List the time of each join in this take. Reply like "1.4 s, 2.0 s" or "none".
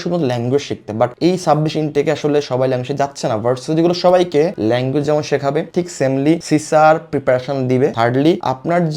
none